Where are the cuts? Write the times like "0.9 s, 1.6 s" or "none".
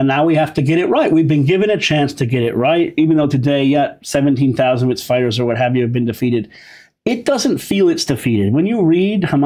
2.9 s